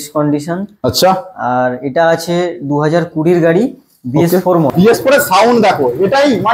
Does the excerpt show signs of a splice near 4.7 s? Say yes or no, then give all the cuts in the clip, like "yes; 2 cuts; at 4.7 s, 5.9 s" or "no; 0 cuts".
yes; 1 cut; at 4.7 s